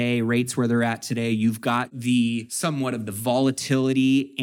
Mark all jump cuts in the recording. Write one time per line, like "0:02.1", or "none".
0:02.3